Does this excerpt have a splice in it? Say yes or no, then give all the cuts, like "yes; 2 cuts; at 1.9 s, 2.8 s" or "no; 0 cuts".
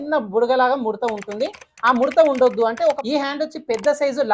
yes; 1 cut; at 3.0 s